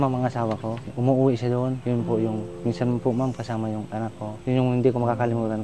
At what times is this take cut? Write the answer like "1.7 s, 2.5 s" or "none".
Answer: none